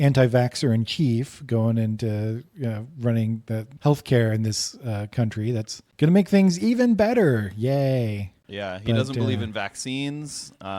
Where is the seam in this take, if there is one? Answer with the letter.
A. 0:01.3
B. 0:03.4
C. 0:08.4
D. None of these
D